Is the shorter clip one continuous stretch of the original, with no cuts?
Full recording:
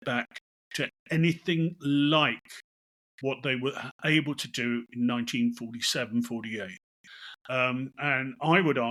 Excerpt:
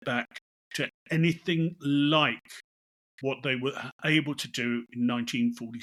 yes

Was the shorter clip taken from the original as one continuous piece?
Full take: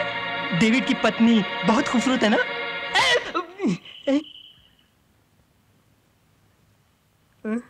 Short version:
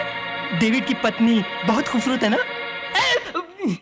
yes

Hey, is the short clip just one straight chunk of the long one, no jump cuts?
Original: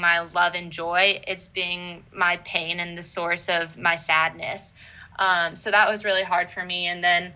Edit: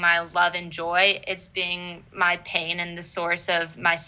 yes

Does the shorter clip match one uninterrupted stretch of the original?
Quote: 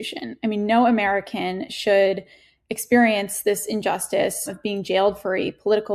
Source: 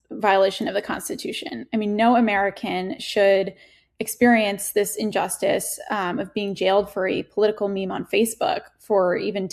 no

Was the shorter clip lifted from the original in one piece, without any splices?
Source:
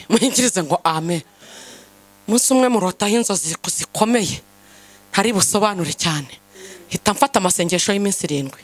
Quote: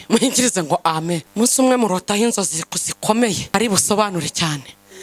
no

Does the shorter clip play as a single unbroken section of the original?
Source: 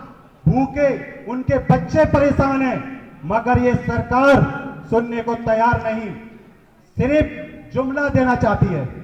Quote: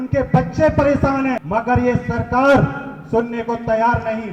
no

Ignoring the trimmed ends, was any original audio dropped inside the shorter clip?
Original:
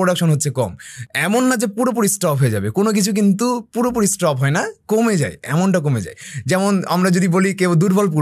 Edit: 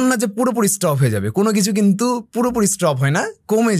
no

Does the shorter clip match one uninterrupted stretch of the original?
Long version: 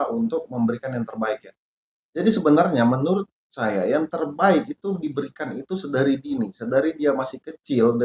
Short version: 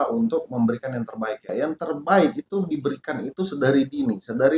no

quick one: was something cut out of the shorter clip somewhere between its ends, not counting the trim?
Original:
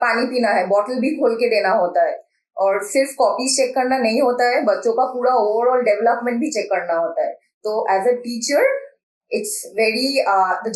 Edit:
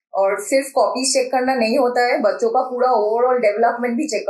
no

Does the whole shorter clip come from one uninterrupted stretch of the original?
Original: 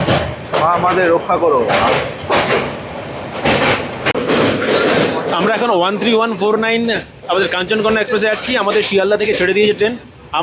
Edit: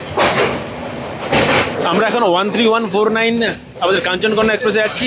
no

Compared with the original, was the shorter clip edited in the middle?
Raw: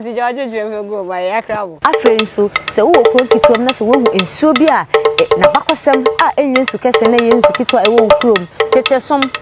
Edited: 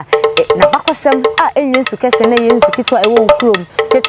no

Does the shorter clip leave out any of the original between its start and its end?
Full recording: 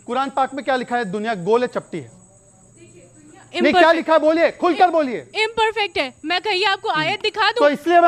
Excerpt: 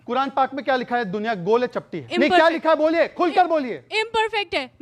yes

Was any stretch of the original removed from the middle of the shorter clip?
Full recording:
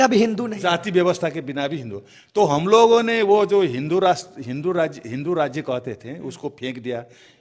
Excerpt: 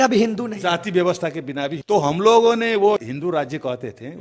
yes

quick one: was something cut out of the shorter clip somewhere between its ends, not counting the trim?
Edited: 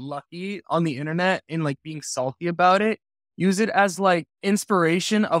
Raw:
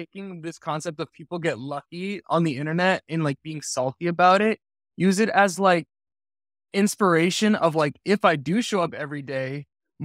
yes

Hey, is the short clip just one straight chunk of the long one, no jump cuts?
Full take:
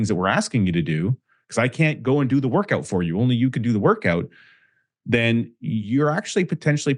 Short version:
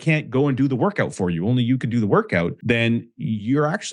no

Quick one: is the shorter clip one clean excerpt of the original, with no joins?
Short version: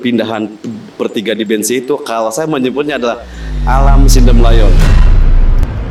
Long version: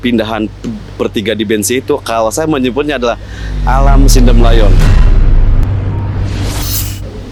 yes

